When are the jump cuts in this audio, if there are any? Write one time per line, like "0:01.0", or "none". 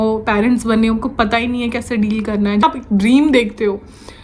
0:02.6